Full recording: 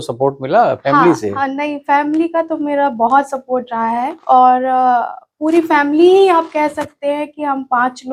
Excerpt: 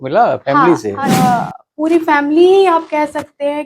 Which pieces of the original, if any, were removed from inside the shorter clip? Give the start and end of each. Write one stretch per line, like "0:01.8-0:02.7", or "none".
0:01.5-0:04.7